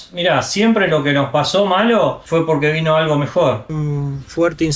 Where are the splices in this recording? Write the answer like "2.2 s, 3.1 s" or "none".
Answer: 3.8 s